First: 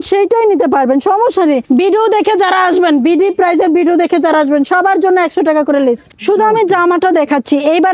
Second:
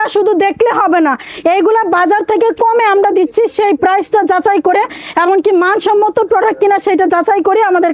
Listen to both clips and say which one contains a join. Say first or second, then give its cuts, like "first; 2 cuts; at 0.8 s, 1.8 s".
first; 2 cuts; at 1.6 s, 6.1 s